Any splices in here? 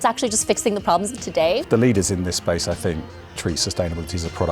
yes; 1 cut; at 1.6 s

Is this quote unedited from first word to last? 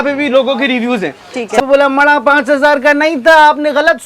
no; 1 cut; at 1.6 s

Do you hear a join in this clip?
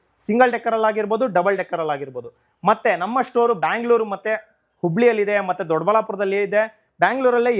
no; 0 cuts

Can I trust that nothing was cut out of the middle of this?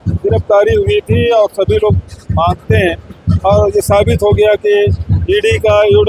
yes; 0 cuts

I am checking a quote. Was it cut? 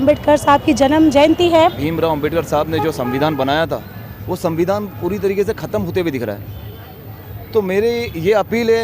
yes; 1 cut; at 1.8 s

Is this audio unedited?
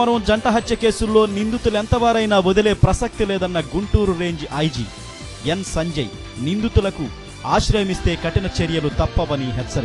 yes; 0 cuts

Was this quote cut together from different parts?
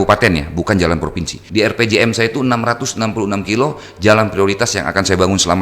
yes; 1 cut; at 1.4 s

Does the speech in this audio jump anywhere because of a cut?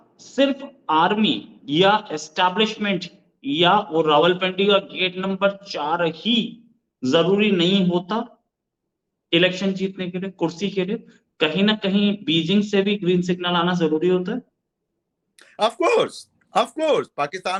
no; 0 cuts

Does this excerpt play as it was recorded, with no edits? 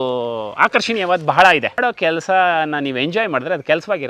no; 1 cut; at 1.8 s

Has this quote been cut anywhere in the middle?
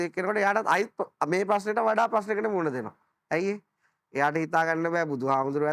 no; 0 cuts

